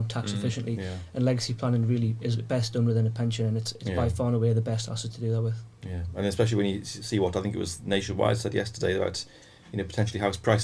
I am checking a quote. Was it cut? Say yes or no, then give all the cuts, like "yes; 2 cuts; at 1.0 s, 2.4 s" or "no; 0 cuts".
no; 0 cuts